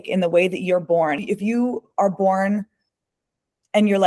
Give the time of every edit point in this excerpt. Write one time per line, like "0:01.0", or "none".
0:01.2